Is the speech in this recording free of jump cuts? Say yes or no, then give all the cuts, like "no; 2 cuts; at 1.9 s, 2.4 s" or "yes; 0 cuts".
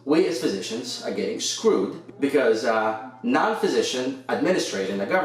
no; 1 cut; at 2.0 s